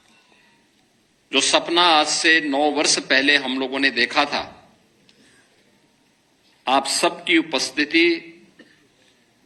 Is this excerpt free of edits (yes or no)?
yes